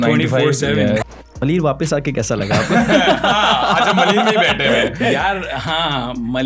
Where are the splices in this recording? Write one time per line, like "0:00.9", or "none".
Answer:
0:01.1